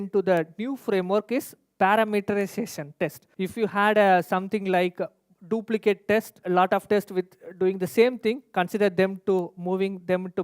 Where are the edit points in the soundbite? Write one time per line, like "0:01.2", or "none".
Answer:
0:03.2
0:06.3